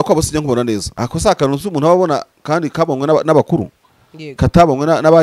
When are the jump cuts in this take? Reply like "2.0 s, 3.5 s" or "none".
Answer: 0.9 s